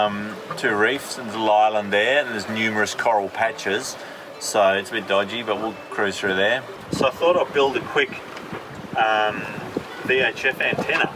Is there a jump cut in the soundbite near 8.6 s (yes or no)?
no